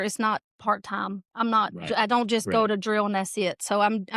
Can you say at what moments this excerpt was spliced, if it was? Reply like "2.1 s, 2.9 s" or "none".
none